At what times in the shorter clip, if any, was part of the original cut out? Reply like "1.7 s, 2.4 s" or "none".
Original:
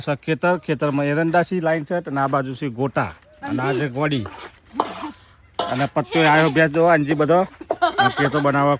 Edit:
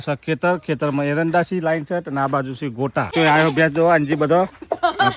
3.1 s